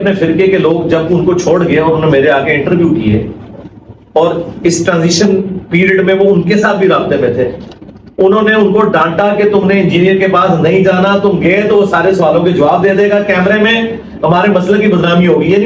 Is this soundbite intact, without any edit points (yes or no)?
yes